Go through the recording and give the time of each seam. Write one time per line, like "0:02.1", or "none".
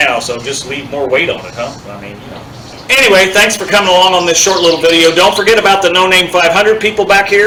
none